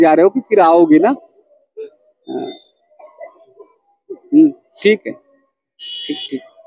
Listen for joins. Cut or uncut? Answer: uncut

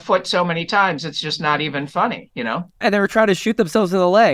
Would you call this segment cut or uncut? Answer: uncut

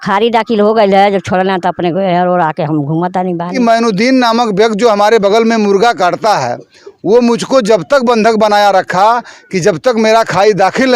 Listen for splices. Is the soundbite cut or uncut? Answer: cut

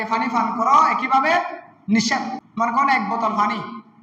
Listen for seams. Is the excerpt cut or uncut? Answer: cut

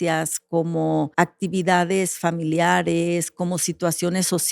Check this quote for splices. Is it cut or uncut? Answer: cut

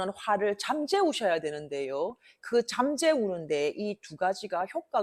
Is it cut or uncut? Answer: uncut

